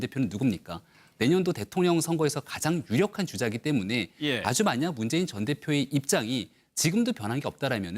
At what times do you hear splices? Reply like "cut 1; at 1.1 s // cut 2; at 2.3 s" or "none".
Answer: cut 1; at 2.3 s